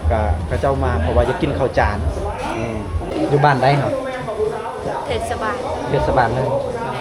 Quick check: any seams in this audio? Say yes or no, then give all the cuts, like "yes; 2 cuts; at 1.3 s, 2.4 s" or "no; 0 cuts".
yes; 1 cut; at 3.1 s